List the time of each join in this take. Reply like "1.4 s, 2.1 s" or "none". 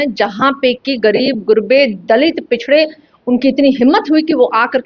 none